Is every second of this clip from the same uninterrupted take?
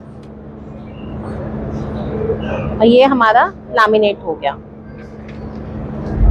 yes; 0 cuts

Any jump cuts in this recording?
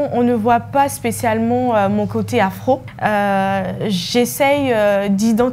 yes; 1 cut; at 2.9 s

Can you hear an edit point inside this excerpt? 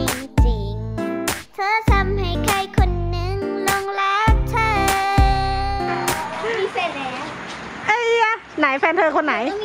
yes; 1 cut; at 6.2 s

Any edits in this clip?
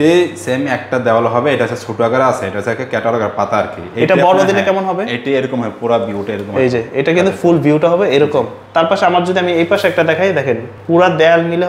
no; 0 cuts

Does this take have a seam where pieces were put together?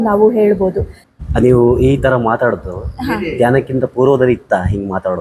yes; 1 cut; at 1.1 s

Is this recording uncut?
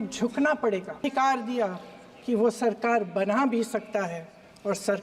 no; 1 cut; at 1.0 s

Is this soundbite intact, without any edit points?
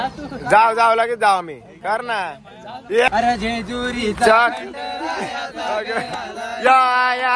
no; 1 cut; at 3.1 s

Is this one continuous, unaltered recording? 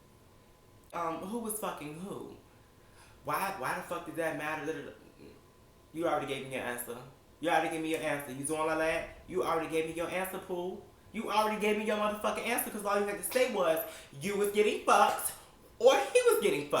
no; 1 cut; at 0.9 s

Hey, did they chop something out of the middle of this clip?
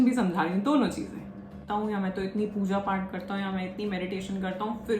yes; 1 cut; at 1.7 s

